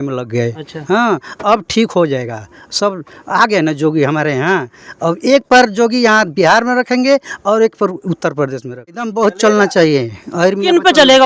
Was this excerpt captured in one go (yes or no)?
no